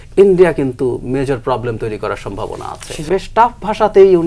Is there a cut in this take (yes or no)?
yes